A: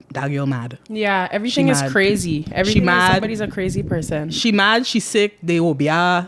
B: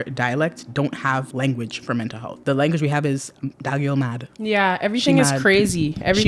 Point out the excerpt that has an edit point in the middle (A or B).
B